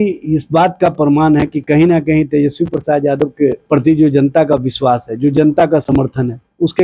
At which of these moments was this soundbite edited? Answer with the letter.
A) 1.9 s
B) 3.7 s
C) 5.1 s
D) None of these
D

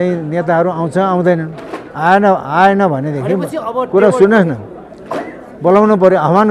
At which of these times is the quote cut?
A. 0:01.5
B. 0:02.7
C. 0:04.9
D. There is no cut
D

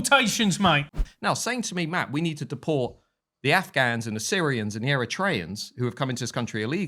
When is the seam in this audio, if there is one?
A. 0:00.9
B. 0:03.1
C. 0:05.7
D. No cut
A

